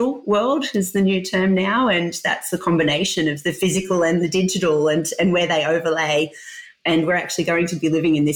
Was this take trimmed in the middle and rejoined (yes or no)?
no